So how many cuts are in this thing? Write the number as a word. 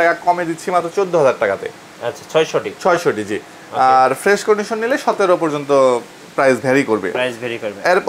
zero